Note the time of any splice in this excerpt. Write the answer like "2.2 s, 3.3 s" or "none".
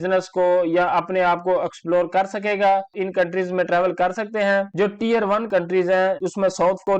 2.9 s, 4.7 s